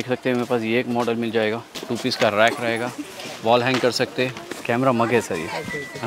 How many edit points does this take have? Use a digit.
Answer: 2